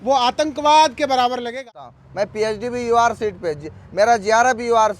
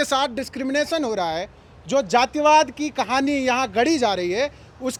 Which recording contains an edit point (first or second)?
first